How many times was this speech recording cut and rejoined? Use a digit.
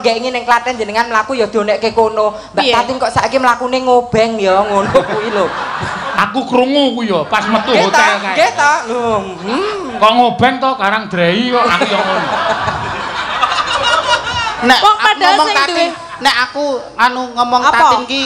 1